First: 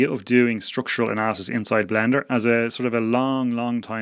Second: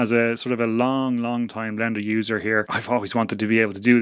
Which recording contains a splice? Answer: second; 1 cut; at 2.7 s

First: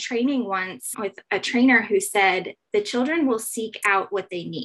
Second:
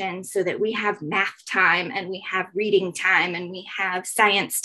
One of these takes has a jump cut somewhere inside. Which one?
first; 1 cut; at 0.9 s

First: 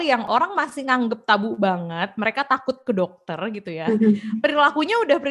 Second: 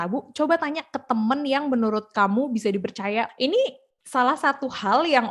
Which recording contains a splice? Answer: second; 1 cut; at 3.3 s

